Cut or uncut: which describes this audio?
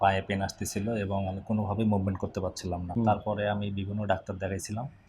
cut